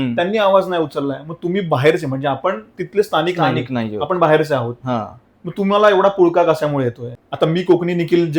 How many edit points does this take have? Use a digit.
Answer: 1